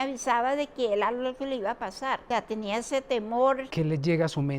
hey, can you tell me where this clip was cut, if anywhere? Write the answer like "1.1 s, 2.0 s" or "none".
2.2 s, 3.7 s